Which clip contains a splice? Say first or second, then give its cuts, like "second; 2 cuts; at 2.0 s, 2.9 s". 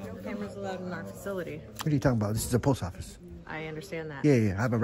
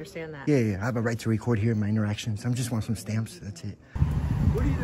second; 1 cut; at 3.9 s